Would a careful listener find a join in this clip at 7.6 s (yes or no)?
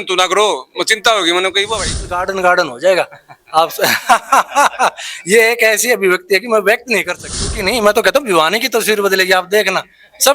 yes